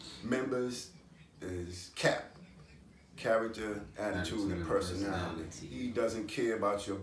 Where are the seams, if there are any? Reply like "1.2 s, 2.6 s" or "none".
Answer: 5.6 s